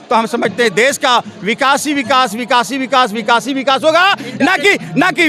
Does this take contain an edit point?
no; 0 cuts

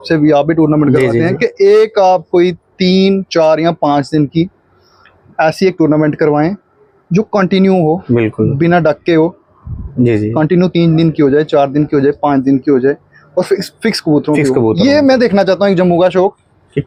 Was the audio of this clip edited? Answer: no; 0 cuts

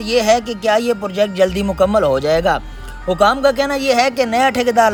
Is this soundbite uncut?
yes; 0 cuts

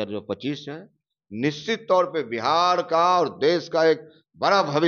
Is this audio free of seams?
yes; 0 cuts

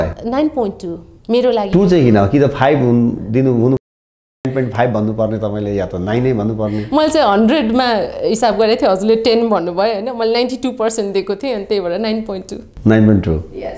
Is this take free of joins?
yes; 0 cuts

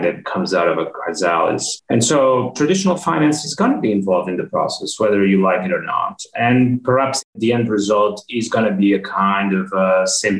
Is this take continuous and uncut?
no; 1 cut; at 7.2 s

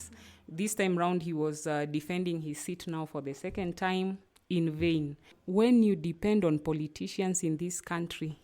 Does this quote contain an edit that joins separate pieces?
no; 0 cuts

